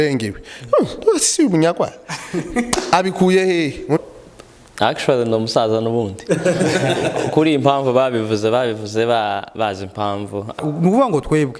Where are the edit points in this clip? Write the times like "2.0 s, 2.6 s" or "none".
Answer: 4.0 s, 10.6 s

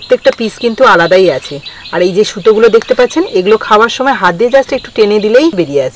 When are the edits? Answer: none

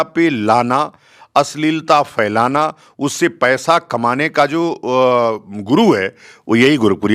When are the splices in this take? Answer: none

